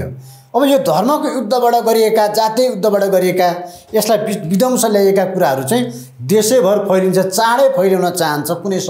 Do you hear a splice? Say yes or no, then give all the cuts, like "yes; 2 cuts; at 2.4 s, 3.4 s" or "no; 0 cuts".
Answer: no; 0 cuts